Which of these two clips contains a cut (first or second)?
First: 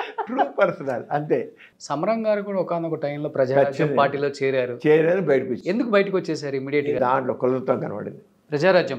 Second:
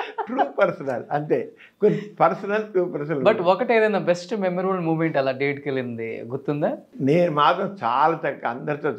first